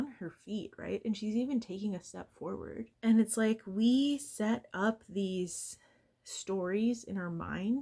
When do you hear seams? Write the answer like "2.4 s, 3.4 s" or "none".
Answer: 2.9 s